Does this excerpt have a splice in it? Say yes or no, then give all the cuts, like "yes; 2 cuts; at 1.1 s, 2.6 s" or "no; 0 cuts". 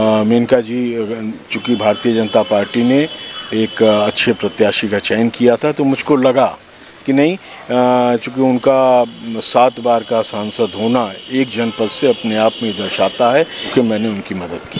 yes; 1 cut; at 13.6 s